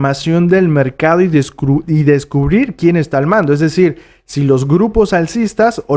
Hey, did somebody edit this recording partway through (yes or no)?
no